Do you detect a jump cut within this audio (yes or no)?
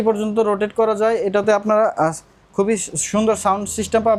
no